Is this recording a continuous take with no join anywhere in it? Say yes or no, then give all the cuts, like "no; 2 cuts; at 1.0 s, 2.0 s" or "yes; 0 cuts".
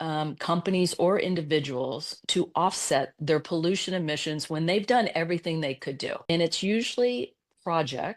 no; 1 cut; at 6.2 s